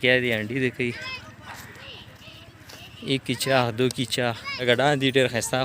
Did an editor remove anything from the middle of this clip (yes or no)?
yes